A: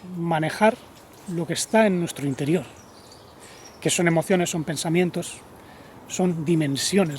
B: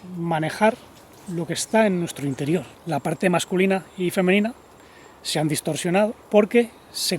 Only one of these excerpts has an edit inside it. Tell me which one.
B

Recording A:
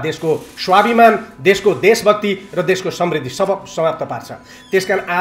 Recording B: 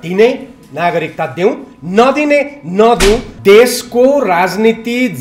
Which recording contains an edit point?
B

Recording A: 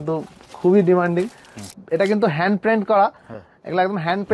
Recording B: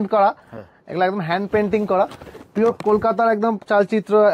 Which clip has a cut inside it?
A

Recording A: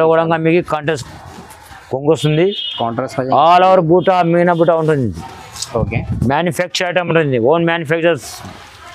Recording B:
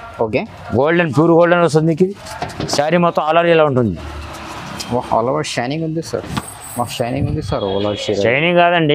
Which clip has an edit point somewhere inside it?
B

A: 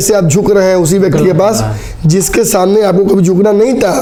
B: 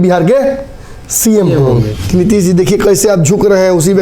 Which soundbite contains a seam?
B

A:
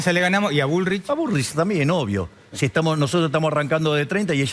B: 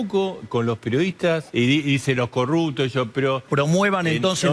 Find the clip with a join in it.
B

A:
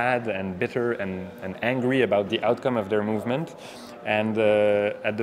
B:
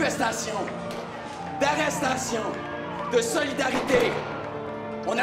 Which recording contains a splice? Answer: B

